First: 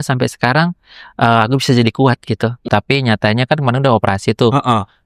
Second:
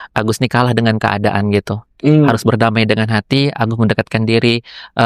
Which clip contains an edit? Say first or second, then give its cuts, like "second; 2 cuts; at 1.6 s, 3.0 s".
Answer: first; 1 cut; at 2.7 s